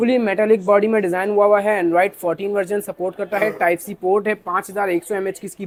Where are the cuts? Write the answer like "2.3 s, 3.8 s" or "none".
none